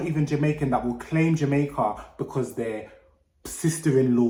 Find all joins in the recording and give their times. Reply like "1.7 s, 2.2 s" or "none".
none